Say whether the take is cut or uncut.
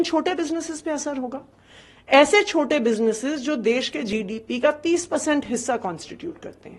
uncut